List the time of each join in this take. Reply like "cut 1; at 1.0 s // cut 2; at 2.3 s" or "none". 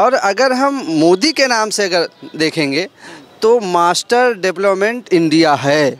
none